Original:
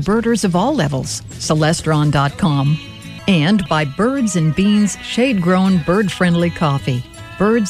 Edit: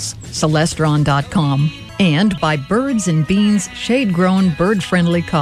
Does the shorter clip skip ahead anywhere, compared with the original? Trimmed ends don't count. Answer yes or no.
yes